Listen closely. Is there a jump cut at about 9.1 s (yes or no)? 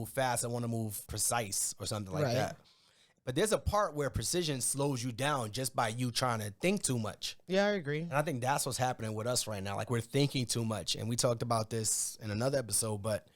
no